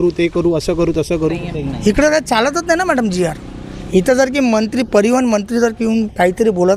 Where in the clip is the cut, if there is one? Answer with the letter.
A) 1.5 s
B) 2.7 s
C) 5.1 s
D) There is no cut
A